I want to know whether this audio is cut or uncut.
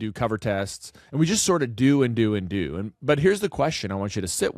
uncut